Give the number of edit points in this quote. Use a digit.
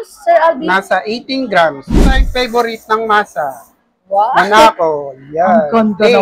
1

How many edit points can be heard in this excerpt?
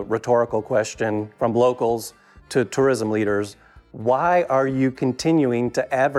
1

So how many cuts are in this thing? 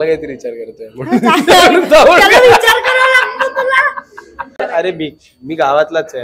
1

